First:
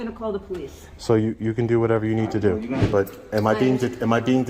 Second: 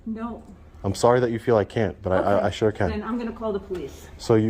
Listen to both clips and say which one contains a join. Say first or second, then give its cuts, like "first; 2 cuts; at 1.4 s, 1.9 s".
first; 1 cut; at 2.9 s